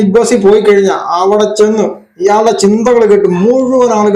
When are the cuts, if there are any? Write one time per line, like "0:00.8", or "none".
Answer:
none